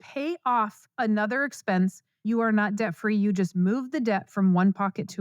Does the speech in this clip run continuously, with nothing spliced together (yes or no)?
no